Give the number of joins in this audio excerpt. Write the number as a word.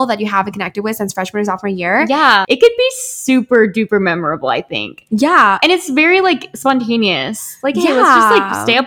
one